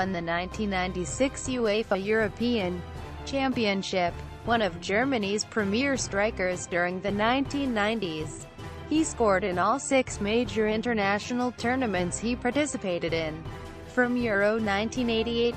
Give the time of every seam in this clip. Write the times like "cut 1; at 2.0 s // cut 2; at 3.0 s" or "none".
none